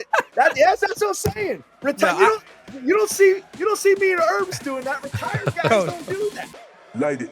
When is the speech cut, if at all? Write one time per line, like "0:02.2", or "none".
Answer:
0:06.3